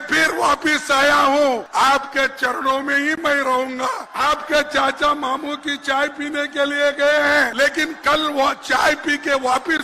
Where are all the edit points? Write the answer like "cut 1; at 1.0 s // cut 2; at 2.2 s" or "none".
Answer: cut 1; at 1.7 s // cut 2; at 4.1 s // cut 3; at 7.5 s